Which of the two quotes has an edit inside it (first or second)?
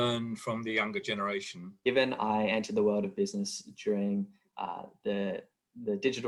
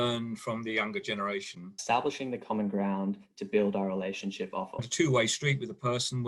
second